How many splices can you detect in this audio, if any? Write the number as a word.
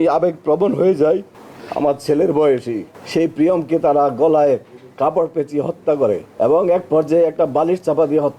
two